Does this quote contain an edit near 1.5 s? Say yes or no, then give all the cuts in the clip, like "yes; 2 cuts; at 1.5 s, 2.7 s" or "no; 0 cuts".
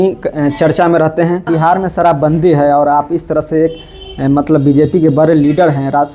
yes; 1 cut; at 1.5 s